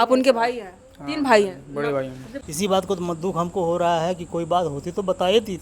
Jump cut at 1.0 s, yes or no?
no